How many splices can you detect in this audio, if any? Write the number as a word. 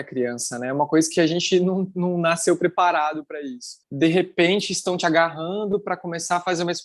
one